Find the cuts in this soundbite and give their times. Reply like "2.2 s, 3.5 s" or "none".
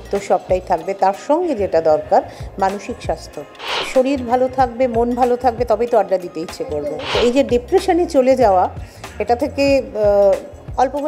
3.7 s, 7.1 s

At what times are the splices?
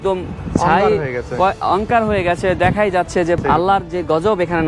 3.4 s

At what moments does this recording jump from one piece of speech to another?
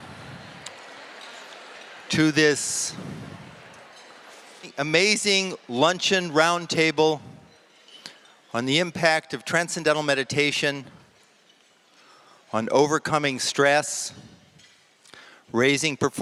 none

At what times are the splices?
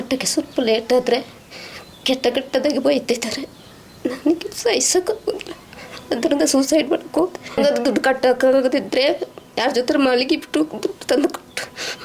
7.6 s

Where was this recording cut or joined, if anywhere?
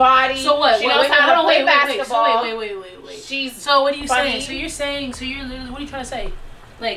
none

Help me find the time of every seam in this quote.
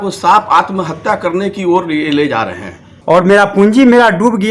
2.9 s

